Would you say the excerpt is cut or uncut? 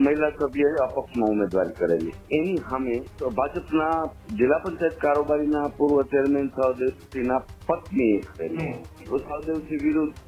cut